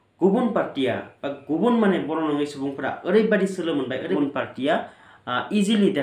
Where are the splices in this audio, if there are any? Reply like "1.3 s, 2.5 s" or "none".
4.2 s